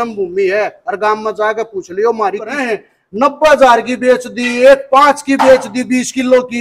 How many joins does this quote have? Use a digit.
1